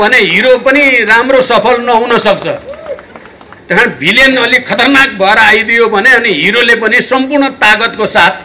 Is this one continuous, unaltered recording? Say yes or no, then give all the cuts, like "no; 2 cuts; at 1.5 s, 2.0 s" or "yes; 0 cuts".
yes; 0 cuts